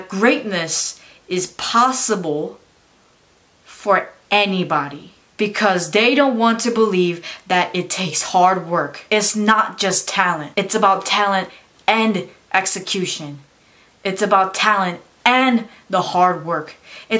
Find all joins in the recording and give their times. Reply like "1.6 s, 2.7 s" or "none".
none